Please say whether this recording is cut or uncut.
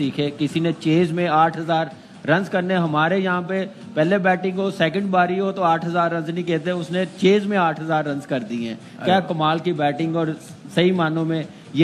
uncut